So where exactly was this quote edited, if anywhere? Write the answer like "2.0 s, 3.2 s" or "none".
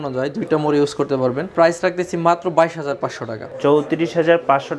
1.5 s, 3.5 s